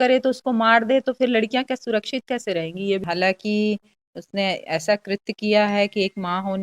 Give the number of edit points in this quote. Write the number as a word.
one